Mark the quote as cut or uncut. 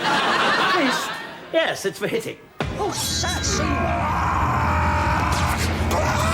cut